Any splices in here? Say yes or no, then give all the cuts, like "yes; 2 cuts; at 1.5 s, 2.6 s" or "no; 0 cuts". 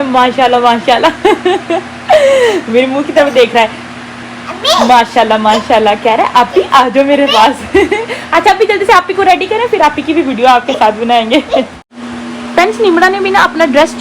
no; 0 cuts